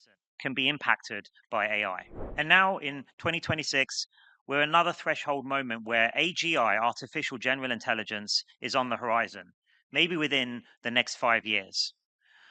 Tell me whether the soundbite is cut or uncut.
cut